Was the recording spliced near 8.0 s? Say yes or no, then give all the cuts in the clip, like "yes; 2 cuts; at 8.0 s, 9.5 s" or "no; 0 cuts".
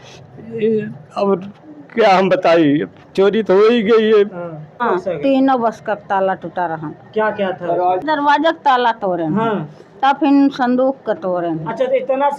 yes; 2 cuts; at 4.8 s, 8.0 s